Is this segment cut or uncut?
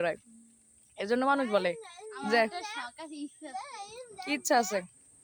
uncut